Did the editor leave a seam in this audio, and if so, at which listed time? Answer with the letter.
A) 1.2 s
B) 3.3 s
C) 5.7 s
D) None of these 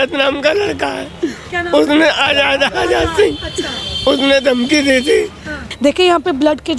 C